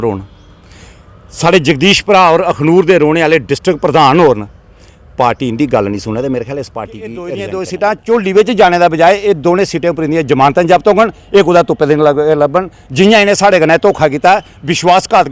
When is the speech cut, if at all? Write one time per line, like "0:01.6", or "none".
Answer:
0:07.1

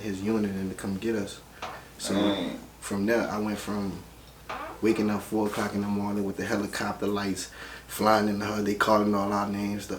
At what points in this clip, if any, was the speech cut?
none

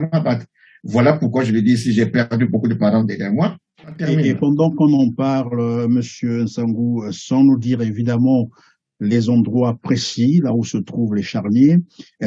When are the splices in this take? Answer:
0:04.0

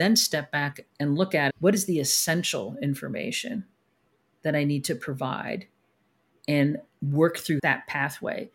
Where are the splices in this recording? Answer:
0:01.0
0:06.9
0:07.6

